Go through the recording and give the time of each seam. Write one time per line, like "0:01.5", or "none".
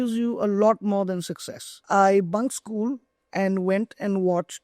0:01.8